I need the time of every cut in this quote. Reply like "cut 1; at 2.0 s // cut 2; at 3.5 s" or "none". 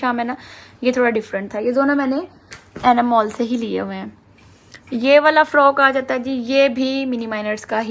none